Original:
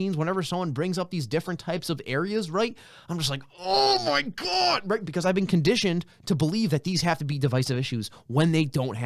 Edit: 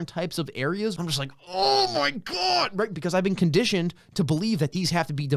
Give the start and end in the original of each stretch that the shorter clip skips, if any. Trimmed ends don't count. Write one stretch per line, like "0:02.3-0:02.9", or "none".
0:02.5-0:03.1